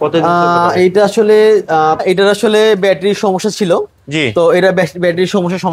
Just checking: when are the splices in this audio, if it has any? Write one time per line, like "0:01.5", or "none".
0:01.8